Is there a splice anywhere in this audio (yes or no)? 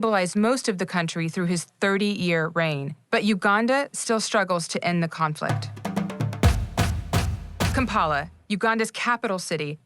yes